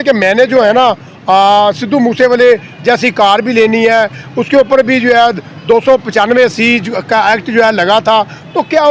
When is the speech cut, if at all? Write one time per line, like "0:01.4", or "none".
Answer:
none